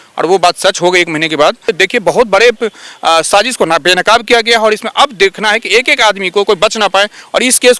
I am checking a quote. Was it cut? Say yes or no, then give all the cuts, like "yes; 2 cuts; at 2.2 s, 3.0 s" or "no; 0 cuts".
yes; 1 cut; at 1.7 s